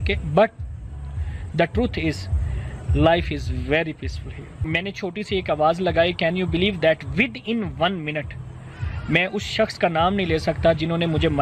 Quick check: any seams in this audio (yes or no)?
yes